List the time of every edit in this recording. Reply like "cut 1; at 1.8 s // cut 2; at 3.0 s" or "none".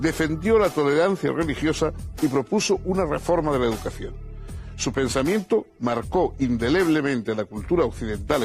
cut 1; at 2.4 s